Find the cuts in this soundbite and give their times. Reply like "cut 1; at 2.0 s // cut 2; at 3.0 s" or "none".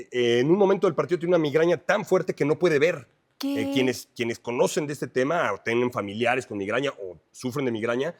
none